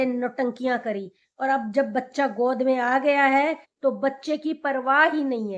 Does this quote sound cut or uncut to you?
uncut